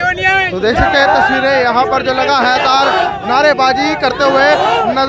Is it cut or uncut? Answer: uncut